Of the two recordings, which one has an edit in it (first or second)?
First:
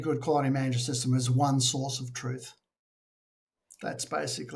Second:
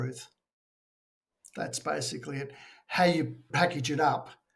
second